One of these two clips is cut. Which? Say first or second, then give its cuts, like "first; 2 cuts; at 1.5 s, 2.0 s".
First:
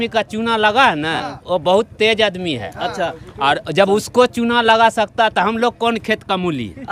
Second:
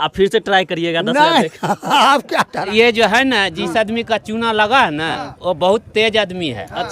second; 1 cut; at 2.7 s